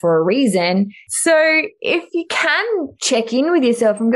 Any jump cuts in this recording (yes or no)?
yes